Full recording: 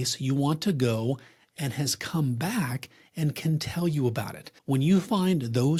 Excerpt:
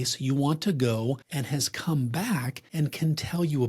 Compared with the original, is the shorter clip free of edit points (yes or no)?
no